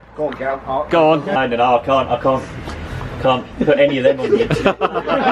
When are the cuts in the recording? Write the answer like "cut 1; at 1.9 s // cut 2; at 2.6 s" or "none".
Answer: cut 1; at 1.3 s